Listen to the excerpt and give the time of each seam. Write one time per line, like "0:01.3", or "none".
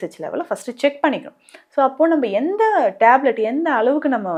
none